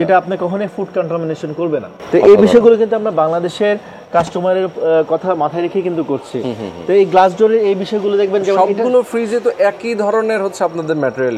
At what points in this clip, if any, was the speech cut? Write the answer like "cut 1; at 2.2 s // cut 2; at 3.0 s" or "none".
none